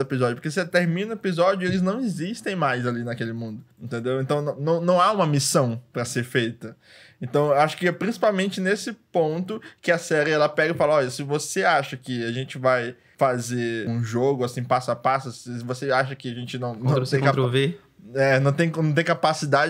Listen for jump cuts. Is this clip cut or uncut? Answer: uncut